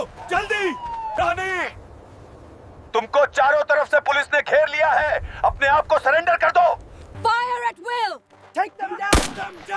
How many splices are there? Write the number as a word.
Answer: two